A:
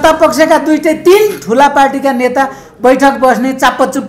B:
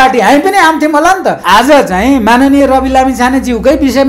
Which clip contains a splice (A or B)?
B